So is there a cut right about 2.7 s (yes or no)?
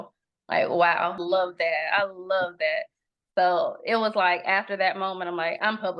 no